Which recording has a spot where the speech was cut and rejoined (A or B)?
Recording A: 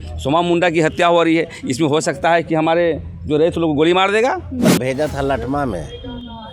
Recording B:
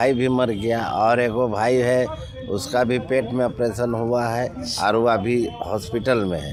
A